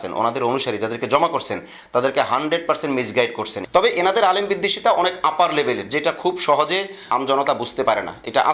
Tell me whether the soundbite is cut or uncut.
cut